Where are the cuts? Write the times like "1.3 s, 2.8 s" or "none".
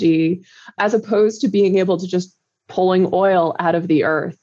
none